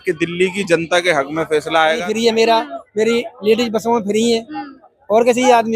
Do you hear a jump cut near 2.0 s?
yes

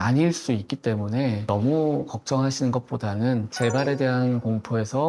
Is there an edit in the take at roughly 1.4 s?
yes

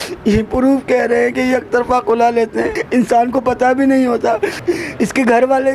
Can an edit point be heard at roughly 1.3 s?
no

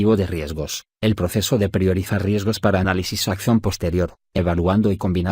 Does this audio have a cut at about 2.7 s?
no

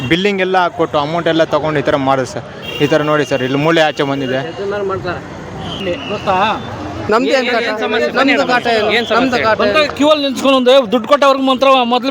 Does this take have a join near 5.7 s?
yes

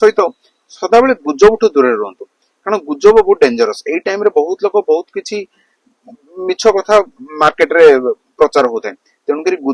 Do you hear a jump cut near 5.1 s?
no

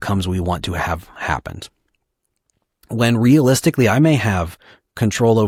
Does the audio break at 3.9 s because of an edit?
no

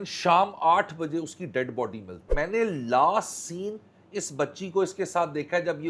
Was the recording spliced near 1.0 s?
no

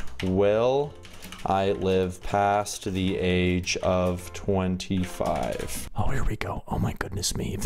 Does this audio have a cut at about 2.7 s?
no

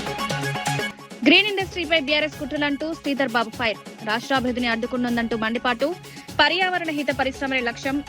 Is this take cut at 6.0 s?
no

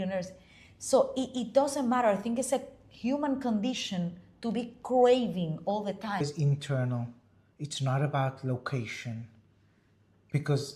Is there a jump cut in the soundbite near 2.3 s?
no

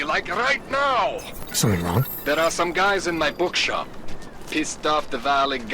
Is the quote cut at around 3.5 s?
no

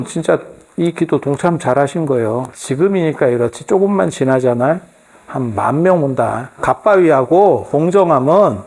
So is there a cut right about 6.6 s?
yes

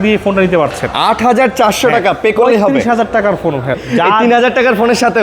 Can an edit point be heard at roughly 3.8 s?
yes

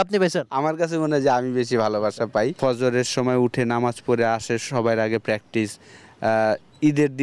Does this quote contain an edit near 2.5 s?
yes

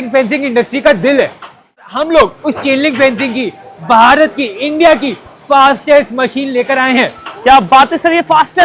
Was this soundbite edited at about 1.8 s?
yes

